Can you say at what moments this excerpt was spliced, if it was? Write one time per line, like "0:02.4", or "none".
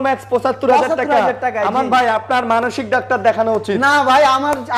none